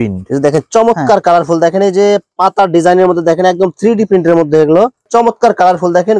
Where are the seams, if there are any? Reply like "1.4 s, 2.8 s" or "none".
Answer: 5.1 s